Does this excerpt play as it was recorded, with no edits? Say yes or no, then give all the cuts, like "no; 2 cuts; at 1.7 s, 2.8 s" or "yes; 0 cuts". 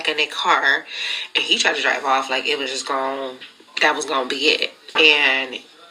no; 1 cut; at 5.0 s